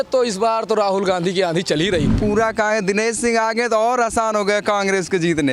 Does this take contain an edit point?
yes; 1 cut; at 2.2 s

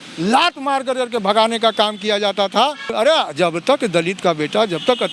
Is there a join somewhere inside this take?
yes; 1 cut; at 2.9 s

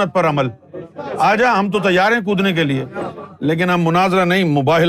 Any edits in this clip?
yes; 1 cut; at 3.2 s

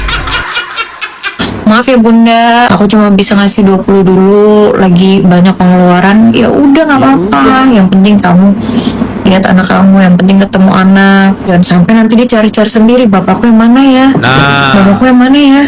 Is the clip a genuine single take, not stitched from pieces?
no; 3 cuts; at 1.5 s, 2.7 s, 11.5 s

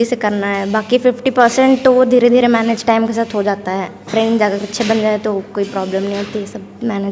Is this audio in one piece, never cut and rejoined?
yes; 0 cuts

